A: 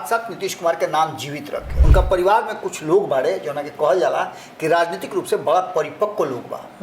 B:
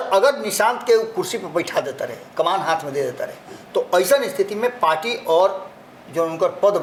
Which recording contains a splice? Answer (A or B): A